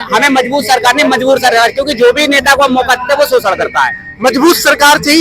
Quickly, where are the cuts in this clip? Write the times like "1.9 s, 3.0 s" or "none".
none